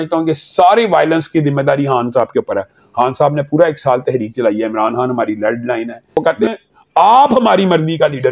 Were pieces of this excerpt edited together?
yes; 1 cut; at 6.2 s

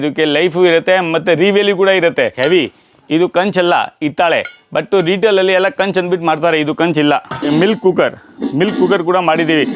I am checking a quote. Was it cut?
yes; 2 cuts; at 2.3 s, 7.4 s

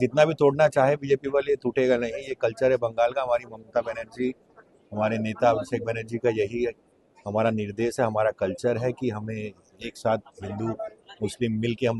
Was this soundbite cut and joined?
no; 0 cuts

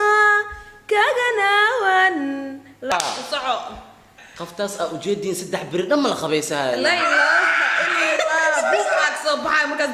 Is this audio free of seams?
no; 1 cut; at 2.9 s

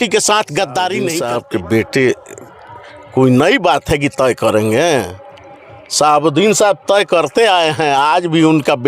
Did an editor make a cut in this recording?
yes; 1 cut; at 1.2 s

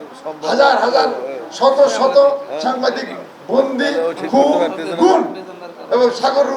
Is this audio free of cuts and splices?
yes; 0 cuts

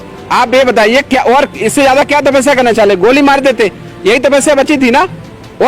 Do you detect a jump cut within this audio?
no; 0 cuts

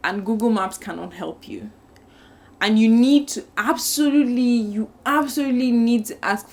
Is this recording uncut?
yes; 0 cuts

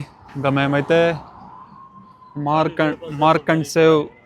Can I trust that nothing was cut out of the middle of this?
yes; 0 cuts

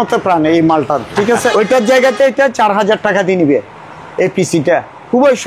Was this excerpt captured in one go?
no; 1 cut; at 1.5 s

